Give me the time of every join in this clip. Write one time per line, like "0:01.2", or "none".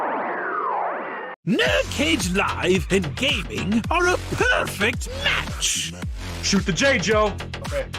0:01.3